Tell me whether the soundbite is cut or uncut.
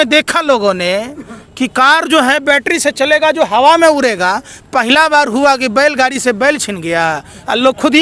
uncut